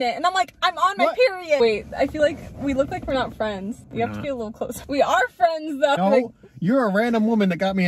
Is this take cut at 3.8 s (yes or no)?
yes